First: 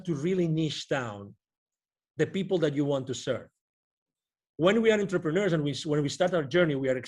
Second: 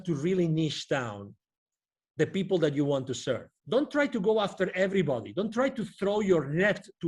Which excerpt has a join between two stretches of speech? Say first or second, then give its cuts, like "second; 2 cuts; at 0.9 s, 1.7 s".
second; 1 cut; at 3.5 s